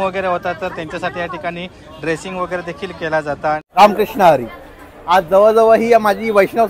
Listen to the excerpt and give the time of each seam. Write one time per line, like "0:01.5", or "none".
0:03.7

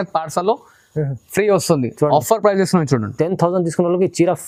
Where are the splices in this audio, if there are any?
none

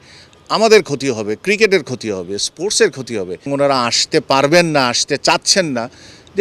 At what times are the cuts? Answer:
0:03.5

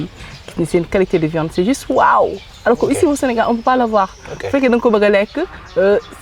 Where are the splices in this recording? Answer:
none

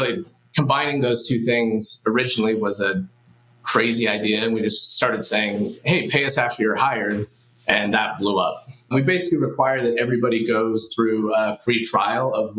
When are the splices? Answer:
0:08.9

